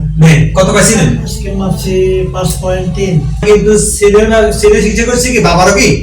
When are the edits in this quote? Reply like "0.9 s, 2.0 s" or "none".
3.3 s